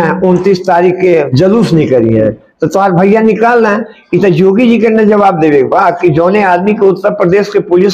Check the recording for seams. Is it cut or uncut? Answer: cut